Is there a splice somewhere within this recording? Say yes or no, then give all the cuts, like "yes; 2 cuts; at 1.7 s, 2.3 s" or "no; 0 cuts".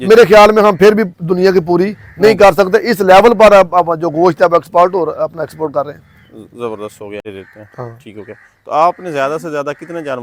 no; 0 cuts